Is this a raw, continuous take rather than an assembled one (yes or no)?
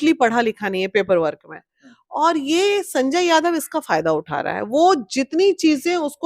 yes